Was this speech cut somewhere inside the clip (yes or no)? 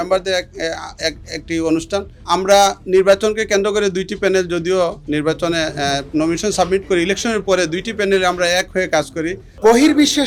no